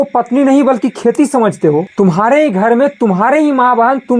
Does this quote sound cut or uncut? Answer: uncut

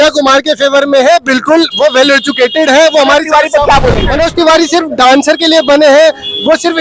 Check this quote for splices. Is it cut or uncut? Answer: cut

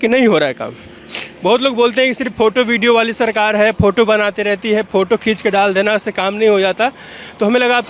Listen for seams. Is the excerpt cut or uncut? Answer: uncut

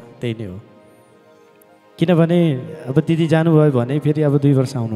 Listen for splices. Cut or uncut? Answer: uncut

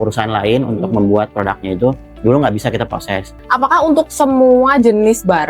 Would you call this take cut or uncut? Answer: cut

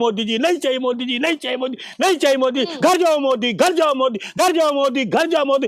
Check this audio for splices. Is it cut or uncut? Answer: uncut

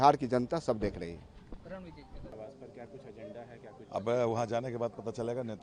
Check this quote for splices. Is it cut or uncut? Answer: uncut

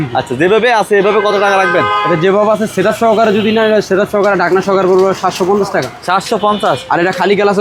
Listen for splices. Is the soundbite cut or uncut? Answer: uncut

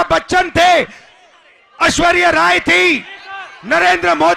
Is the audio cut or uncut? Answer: uncut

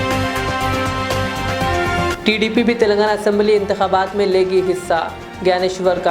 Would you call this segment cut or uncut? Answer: uncut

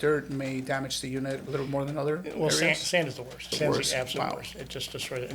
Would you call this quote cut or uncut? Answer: cut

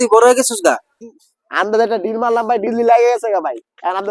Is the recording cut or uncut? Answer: cut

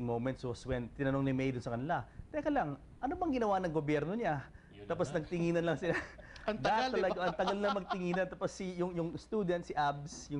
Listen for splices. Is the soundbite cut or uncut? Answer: cut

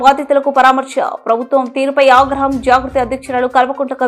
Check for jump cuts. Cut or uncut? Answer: uncut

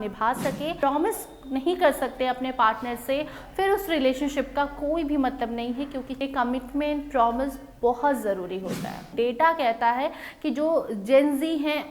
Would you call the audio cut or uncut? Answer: cut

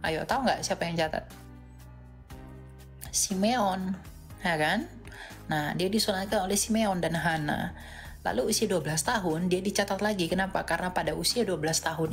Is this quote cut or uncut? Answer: uncut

